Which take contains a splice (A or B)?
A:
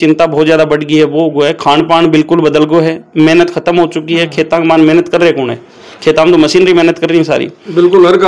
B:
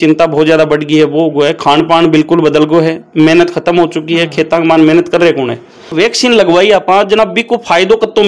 B